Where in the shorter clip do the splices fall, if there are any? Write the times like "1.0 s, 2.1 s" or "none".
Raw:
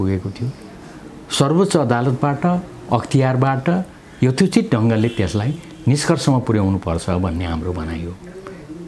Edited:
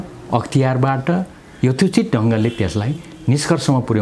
none